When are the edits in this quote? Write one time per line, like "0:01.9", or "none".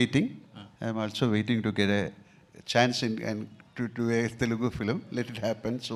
none